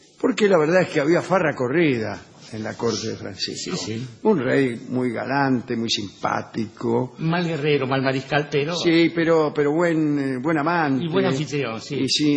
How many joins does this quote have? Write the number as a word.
one